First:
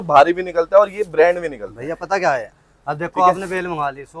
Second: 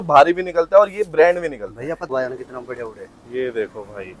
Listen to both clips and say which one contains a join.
second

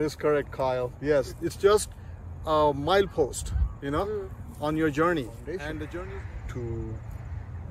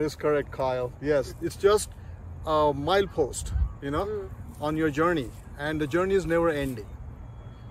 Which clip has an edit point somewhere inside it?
first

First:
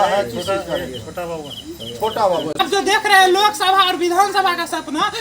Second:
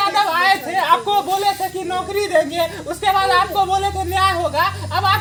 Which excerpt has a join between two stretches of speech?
first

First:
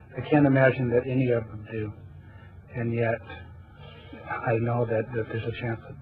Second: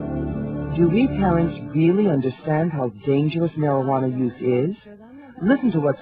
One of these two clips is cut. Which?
second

